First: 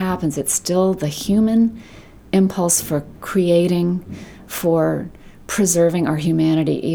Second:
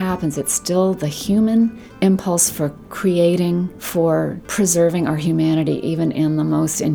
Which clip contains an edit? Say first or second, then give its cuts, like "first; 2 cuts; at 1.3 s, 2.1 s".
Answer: second; 3 cuts; at 1.8 s, 3.8 s, 4.4 s